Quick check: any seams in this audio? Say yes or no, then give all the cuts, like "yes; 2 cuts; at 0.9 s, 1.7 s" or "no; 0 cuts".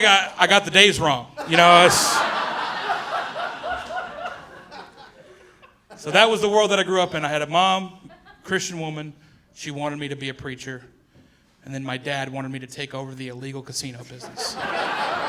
yes; 1 cut; at 5.0 s